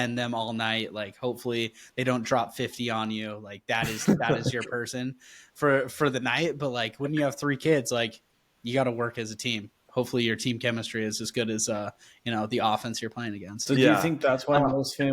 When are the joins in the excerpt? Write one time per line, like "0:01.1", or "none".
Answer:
0:13.6